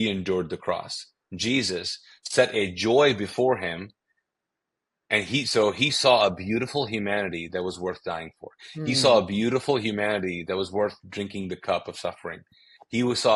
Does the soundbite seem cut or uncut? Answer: uncut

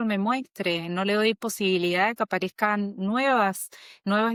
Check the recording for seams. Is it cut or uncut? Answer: uncut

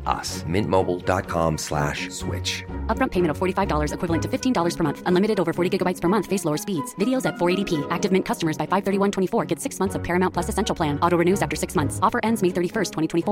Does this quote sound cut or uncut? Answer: uncut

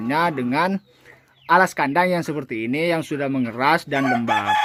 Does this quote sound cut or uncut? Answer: uncut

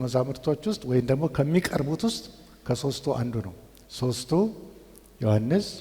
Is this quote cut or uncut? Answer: uncut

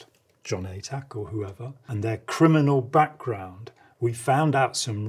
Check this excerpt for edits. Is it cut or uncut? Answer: cut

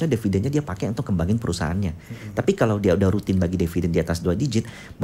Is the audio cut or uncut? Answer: uncut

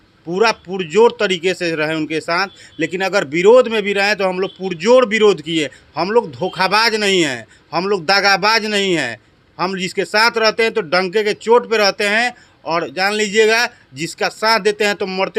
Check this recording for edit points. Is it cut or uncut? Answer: uncut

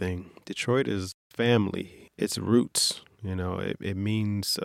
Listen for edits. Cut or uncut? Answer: cut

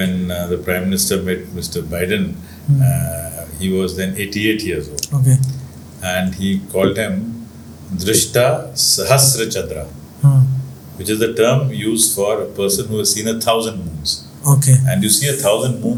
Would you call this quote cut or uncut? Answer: uncut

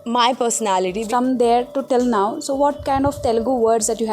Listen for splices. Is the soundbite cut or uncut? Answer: cut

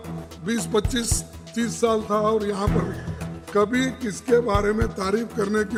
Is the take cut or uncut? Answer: uncut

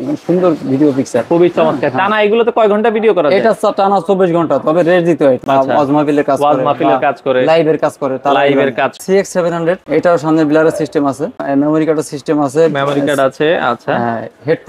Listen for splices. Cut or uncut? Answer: cut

